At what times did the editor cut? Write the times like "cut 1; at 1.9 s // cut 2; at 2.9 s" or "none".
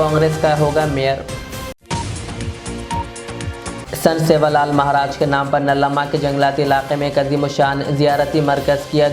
none